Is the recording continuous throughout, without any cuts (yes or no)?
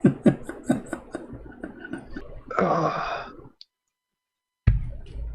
no